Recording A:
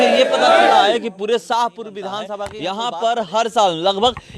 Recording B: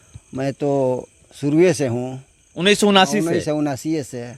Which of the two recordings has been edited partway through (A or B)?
A